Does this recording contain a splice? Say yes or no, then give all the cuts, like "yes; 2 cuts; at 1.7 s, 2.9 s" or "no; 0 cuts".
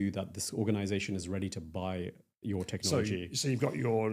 no; 0 cuts